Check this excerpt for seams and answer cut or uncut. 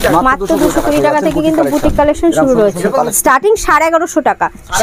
cut